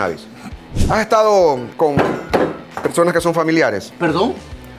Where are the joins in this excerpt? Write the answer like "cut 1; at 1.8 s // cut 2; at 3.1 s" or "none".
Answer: cut 1; at 0.8 s // cut 2; at 1.7 s // cut 3; at 2.7 s // cut 4; at 3.9 s